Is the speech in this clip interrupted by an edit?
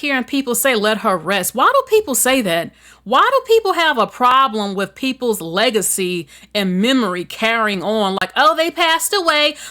no; 0 cuts

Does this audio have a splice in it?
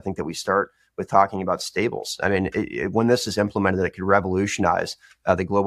no; 0 cuts

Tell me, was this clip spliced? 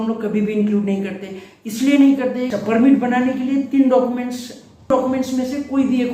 yes; 2 cuts; at 2.6 s, 4.9 s

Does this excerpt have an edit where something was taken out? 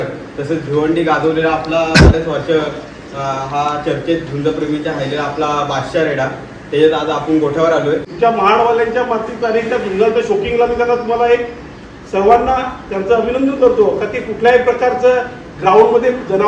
yes; 1 cut; at 8.1 s

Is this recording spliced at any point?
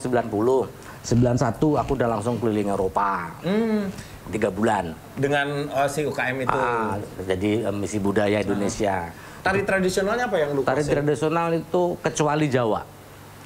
no; 0 cuts

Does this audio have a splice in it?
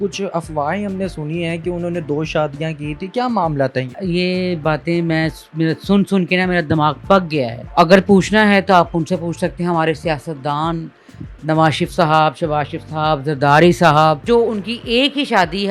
yes; 3 cuts; at 3.9 s, 7.6 s, 14.2 s

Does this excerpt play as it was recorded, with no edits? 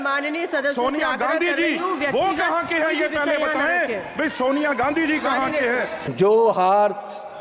no; 1 cut; at 6.0 s

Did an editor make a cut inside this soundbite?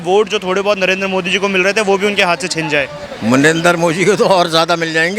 no; 0 cuts

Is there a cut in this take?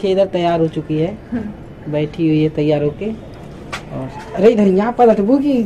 no; 0 cuts

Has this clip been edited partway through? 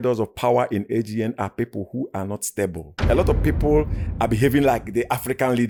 no; 0 cuts

